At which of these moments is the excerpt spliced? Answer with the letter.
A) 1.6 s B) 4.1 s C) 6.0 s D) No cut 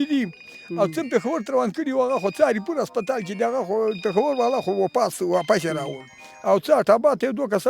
D